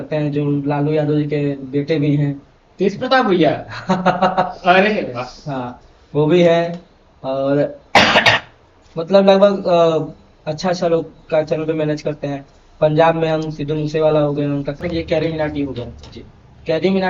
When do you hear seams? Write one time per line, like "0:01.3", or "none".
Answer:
0:14.8